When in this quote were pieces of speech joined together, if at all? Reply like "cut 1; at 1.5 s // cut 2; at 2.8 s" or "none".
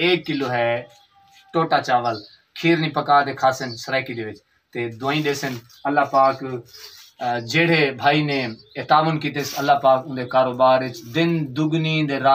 none